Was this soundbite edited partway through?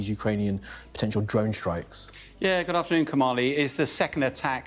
no; 0 cuts

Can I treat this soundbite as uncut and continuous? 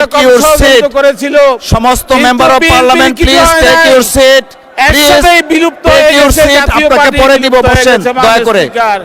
yes; 0 cuts

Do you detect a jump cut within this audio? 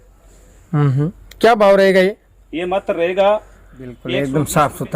yes; 1 cut; at 4.1 s

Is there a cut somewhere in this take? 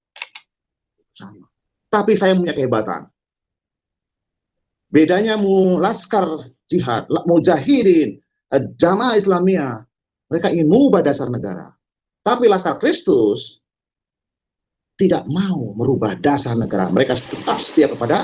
no; 0 cuts

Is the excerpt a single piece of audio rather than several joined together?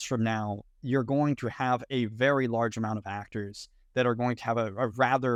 yes; 0 cuts

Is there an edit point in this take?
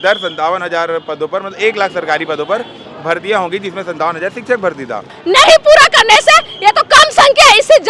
yes; 1 cut; at 5.1 s

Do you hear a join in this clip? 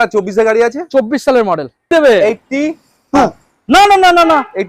yes; 1 cut; at 1.9 s

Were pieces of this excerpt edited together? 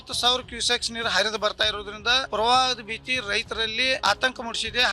yes; 2 cuts; at 2.2 s, 4.0 s

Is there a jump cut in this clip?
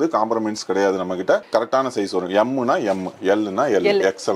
no; 0 cuts

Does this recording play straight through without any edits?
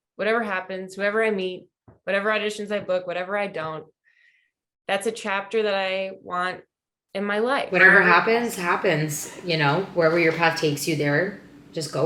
yes; 0 cuts

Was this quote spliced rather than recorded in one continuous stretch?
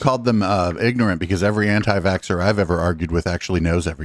no; 0 cuts

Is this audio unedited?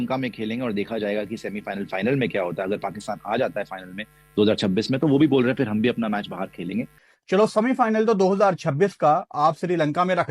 no; 1 cut; at 7.0 s

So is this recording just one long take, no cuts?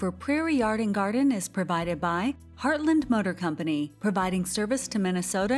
yes; 0 cuts

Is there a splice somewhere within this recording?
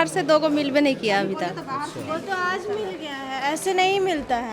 no; 0 cuts

